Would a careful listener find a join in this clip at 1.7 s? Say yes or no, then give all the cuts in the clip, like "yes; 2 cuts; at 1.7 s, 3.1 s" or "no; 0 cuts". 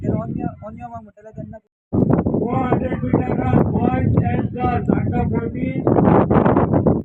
yes; 1 cut; at 1.7 s